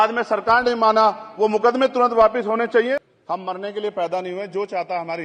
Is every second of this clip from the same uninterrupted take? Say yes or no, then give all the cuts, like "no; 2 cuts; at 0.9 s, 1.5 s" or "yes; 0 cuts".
no; 1 cut; at 2.9 s